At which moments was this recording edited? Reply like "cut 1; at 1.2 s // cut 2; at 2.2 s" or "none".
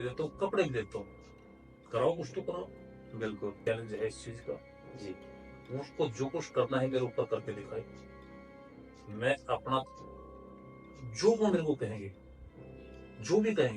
cut 1; at 3.7 s